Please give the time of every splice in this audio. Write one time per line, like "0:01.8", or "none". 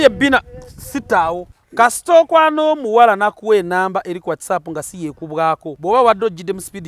0:01.6
0:05.7